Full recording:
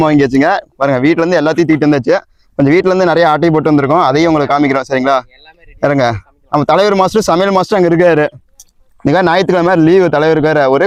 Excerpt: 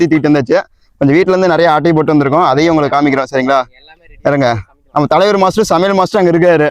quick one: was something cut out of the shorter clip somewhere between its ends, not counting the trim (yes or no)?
no